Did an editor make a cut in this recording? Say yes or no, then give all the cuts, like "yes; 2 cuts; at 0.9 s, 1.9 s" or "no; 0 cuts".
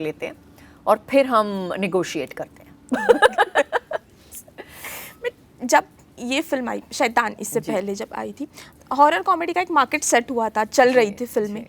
no; 0 cuts